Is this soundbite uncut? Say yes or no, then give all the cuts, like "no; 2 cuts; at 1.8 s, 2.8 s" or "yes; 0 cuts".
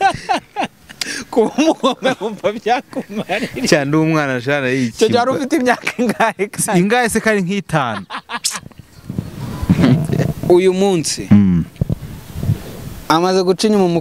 no; 1 cut; at 10.0 s